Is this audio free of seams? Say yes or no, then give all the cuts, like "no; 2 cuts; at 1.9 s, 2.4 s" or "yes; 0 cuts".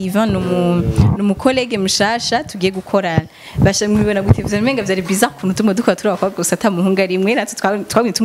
yes; 0 cuts